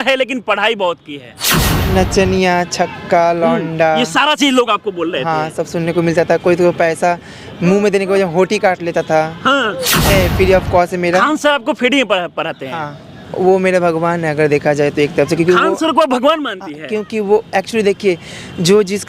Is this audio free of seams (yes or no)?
no